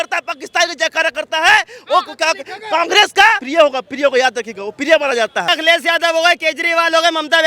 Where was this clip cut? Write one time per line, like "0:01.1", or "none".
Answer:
0:03.4
0:05.5